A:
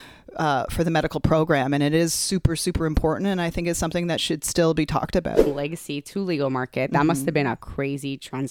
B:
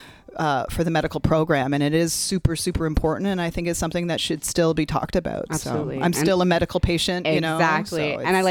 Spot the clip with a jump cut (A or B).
A